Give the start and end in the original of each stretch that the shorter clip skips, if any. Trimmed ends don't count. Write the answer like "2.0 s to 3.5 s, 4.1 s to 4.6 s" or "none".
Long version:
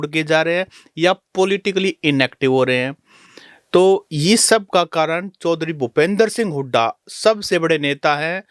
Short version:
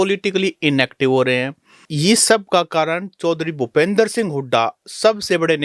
3.3 s to 4.1 s